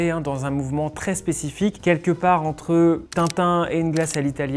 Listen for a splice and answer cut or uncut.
cut